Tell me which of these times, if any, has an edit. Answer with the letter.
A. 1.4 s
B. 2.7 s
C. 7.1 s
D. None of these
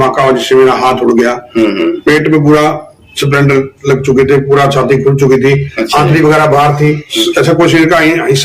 C